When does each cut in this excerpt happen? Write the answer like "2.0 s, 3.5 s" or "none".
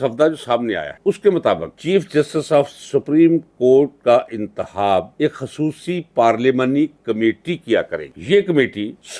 none